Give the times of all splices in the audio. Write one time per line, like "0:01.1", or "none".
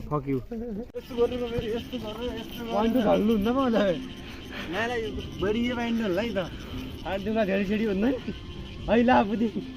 0:01.0